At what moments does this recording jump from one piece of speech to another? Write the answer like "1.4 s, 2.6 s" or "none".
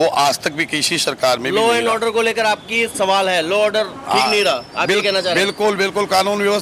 none